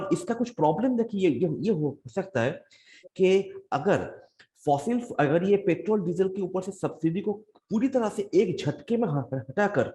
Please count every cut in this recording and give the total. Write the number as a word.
zero